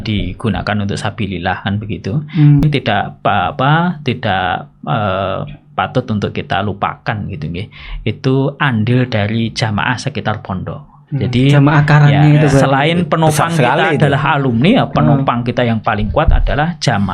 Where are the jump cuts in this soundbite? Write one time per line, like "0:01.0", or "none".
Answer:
0:02.6